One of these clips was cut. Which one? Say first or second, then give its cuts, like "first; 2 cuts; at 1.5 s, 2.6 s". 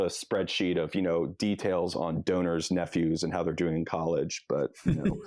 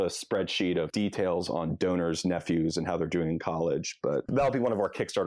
second; 2 cuts; at 0.9 s, 4.3 s